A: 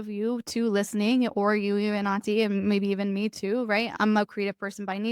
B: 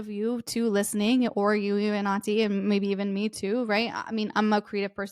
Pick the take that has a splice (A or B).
A